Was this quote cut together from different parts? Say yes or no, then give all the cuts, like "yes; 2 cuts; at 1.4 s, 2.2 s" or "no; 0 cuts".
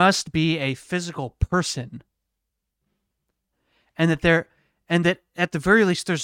no; 0 cuts